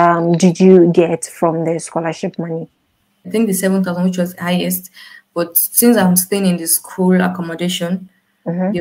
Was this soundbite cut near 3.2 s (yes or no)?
yes